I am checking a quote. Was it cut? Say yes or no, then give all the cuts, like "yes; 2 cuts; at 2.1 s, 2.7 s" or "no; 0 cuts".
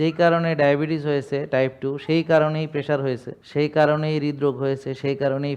yes; 1 cut; at 3.3 s